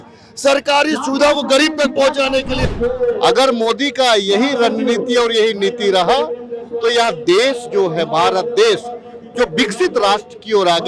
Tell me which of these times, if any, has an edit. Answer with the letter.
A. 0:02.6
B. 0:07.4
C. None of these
A